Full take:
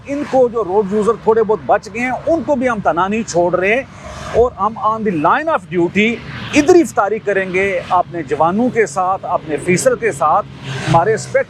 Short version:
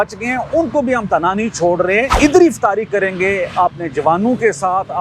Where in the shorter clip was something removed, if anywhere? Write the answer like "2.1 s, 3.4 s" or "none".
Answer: 2.1 s